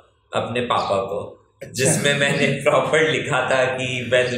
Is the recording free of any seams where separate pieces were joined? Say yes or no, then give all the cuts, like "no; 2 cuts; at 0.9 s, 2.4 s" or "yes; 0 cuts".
yes; 0 cuts